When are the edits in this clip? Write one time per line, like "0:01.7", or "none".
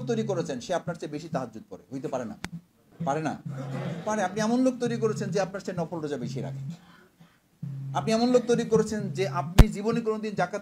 0:02.8